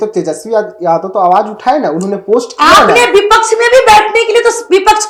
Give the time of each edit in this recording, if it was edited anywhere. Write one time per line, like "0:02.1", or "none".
none